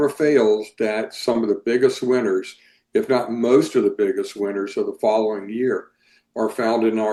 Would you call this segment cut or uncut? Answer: uncut